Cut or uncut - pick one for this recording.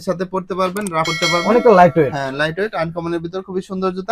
cut